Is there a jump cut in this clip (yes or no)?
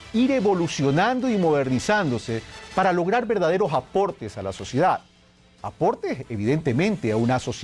no